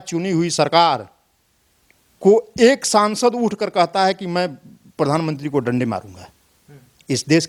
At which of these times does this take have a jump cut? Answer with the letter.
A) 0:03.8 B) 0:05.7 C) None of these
C